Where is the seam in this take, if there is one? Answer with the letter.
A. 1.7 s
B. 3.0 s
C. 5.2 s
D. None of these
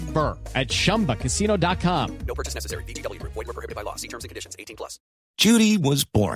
C